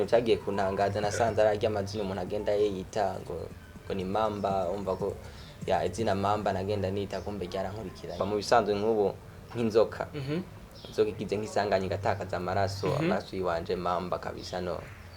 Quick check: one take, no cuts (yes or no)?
no